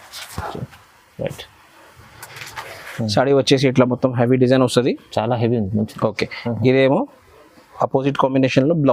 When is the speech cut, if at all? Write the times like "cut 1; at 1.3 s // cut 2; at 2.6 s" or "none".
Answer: none